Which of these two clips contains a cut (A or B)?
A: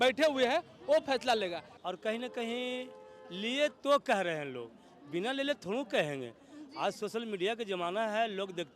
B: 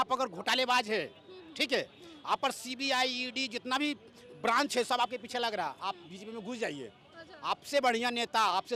A